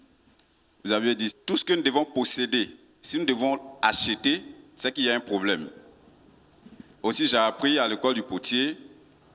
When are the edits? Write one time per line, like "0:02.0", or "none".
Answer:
0:01.3